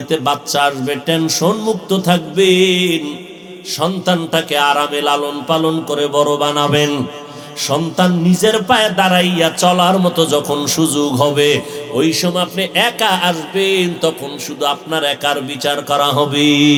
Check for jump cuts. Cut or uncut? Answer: uncut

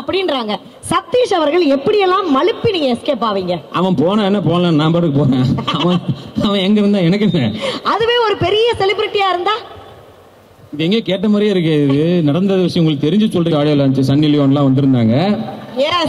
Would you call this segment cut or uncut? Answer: cut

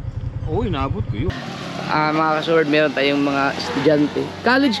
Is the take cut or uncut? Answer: cut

